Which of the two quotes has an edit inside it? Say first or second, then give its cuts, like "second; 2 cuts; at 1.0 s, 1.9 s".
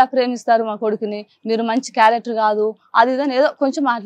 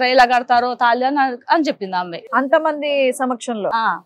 second; 1 cut; at 2.2 s